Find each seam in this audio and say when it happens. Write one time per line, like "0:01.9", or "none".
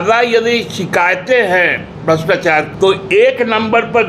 0:02.7